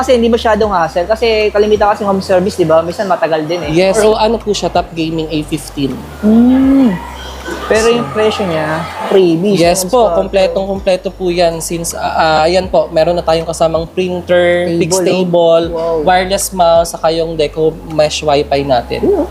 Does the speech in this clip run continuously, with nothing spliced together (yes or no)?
no